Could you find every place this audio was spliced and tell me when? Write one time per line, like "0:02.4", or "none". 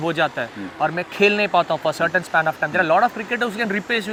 none